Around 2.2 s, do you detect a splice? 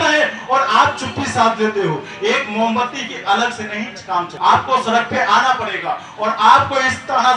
no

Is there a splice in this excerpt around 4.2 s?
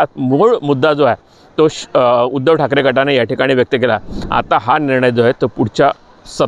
yes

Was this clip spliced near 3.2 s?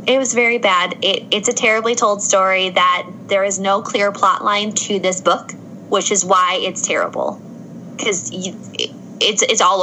no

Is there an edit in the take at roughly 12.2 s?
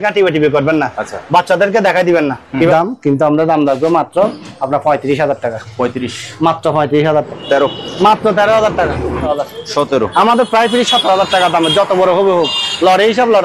no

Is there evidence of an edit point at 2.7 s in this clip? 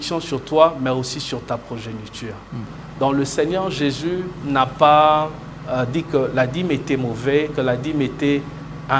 yes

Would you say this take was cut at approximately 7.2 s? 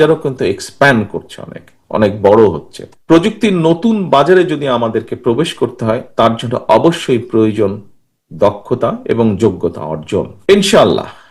no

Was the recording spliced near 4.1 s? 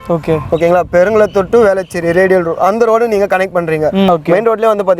yes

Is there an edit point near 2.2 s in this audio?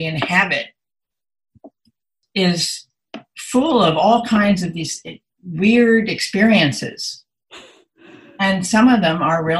yes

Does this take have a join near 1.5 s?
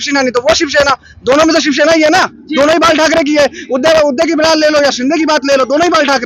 no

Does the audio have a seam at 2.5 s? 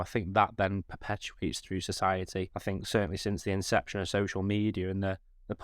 yes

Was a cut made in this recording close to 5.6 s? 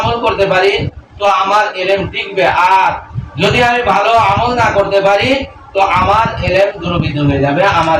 no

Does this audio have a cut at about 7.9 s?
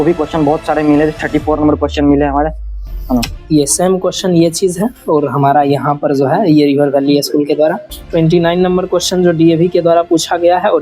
yes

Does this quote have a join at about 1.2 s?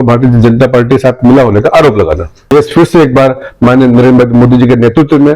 no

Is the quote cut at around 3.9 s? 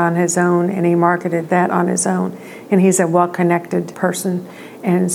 yes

